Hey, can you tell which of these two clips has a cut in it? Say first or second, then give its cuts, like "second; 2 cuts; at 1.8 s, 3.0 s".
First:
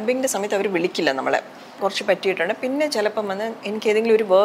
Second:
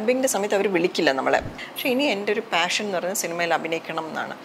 second; 1 cut; at 1.6 s